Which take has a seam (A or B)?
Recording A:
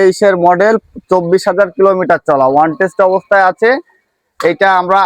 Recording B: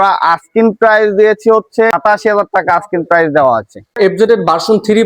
B